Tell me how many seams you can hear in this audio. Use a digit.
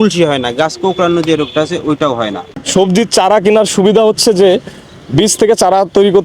1